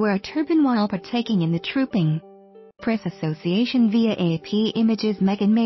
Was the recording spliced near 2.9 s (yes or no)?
yes